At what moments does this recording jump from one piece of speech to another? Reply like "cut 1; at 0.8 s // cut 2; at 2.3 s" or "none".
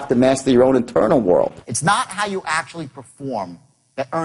cut 1; at 1.7 s